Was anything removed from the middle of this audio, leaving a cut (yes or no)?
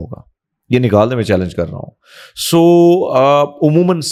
no